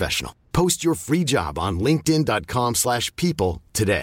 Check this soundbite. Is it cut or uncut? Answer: uncut